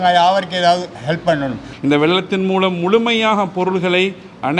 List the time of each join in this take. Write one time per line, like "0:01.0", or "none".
0:01.6